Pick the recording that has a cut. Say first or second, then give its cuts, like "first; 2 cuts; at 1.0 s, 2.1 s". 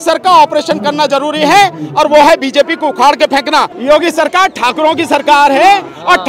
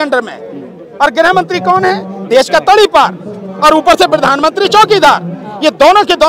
first; 1 cut; at 3.7 s